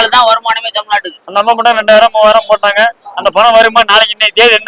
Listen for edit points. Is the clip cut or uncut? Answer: cut